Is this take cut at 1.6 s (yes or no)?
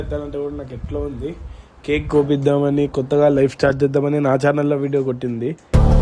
no